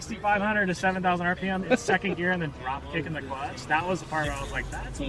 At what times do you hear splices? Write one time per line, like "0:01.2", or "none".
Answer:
none